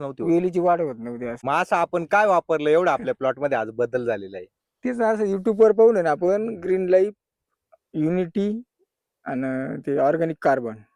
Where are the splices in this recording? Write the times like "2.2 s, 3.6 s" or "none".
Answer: 1.3 s